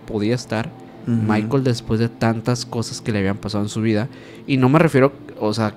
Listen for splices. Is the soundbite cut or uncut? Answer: uncut